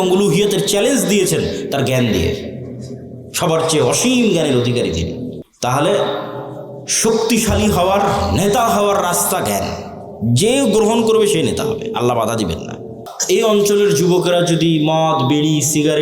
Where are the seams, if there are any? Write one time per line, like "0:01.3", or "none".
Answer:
0:05.4
0:13.1

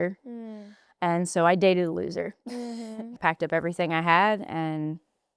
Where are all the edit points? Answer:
0:03.1

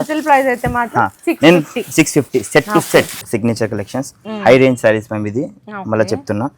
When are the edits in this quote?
0:03.3

